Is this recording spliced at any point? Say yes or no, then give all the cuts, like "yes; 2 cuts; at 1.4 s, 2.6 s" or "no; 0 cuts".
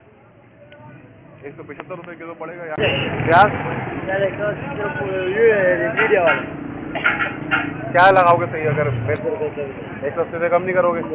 yes; 1 cut; at 2.8 s